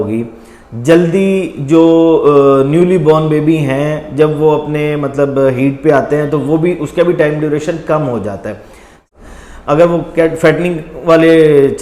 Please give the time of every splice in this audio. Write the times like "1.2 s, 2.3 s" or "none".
9.1 s